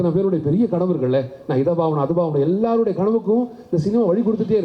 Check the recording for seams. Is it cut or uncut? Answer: uncut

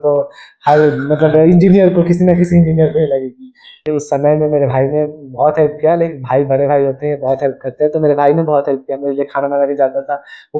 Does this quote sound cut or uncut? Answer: cut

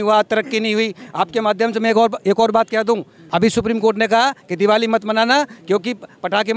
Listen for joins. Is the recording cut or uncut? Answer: cut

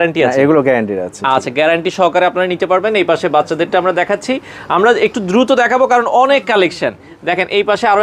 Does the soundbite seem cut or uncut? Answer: uncut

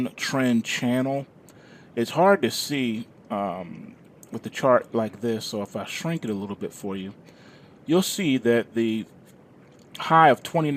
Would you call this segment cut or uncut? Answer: cut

